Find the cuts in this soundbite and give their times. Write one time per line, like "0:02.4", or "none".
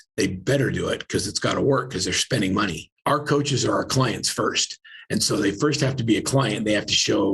0:02.9